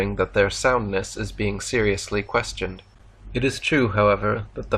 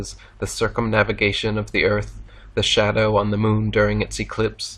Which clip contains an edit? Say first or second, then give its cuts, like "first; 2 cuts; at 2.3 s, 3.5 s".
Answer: second; 1 cut; at 3.9 s